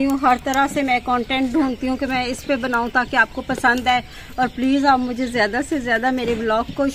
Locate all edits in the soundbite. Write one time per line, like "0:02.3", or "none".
none